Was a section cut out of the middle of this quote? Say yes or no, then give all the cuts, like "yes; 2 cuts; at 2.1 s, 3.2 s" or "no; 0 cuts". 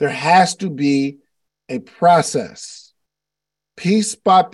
no; 0 cuts